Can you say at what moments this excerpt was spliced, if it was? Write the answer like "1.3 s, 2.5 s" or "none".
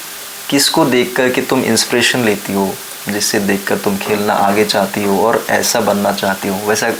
none